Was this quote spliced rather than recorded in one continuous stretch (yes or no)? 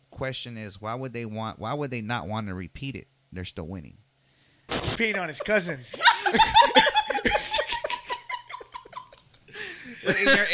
yes